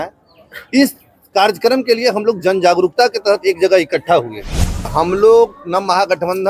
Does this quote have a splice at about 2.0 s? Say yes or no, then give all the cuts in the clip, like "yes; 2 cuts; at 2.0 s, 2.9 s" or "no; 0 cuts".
no; 1 cut; at 4.9 s